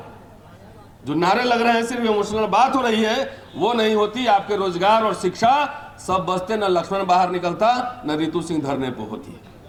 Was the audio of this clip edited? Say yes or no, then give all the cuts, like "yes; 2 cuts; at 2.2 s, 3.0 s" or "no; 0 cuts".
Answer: no; 0 cuts